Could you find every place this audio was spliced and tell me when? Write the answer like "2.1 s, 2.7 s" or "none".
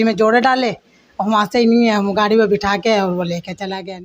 none

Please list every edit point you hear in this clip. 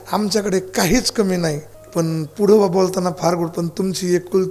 1.7 s

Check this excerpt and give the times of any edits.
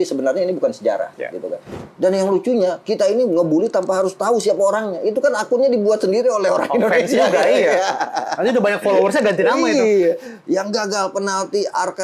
1.8 s

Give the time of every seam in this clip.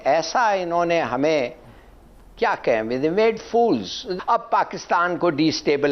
4.1 s

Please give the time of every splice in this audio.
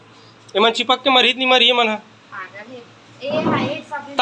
none

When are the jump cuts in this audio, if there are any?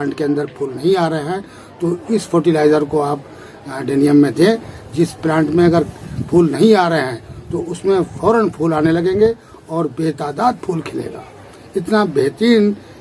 none

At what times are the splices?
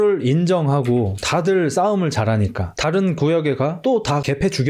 none

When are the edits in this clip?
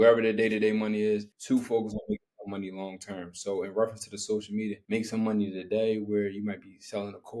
none

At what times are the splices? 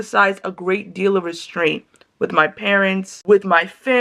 3.1 s

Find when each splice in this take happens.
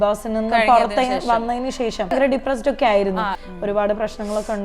2.1 s, 3.4 s

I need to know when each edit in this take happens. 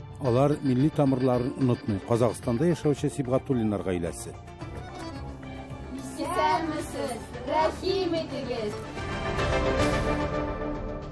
8.9 s

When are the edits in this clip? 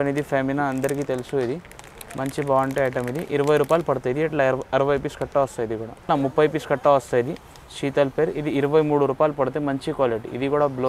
6.1 s

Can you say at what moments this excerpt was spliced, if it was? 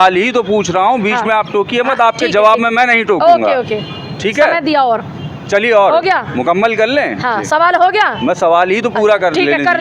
none

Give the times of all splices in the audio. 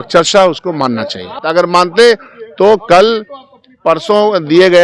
1.4 s

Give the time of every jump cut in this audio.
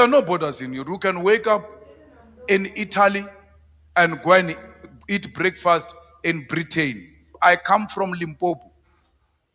7.3 s

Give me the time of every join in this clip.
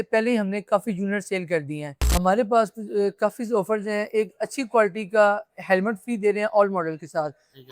2.0 s

